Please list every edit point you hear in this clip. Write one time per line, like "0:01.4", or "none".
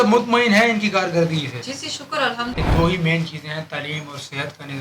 0:02.6